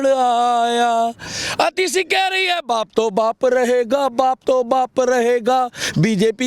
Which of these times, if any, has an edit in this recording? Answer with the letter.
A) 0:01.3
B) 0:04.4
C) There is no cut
C